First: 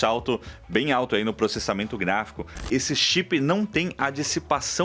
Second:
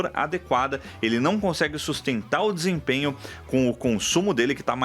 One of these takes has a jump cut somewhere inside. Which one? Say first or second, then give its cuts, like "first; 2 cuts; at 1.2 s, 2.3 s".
first; 1 cut; at 2.6 s